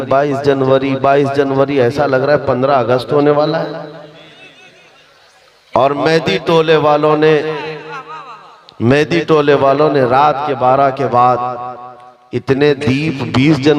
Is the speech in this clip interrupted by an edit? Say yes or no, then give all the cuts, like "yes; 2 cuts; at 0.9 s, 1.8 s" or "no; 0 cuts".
no; 0 cuts